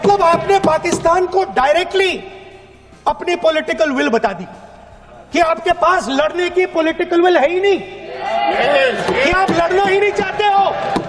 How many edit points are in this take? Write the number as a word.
zero